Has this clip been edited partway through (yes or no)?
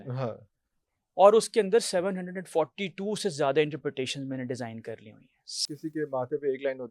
yes